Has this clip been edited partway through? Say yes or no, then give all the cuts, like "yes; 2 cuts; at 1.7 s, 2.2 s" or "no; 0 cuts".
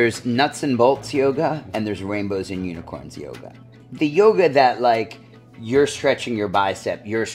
yes; 1 cut; at 3.8 s